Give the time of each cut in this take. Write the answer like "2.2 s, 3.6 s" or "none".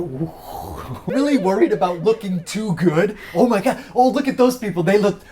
1.1 s